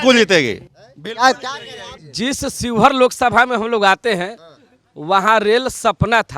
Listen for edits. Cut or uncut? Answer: cut